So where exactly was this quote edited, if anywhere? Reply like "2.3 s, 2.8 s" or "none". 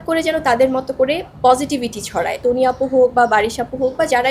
2.4 s